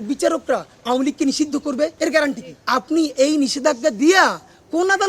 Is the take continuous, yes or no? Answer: no